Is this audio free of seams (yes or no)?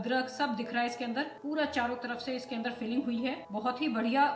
no